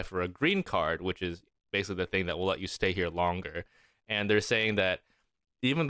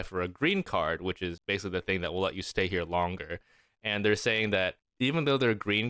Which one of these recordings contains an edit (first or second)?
second